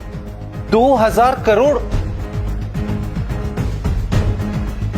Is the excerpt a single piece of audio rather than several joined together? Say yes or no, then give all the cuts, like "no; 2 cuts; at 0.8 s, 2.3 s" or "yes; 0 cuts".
yes; 0 cuts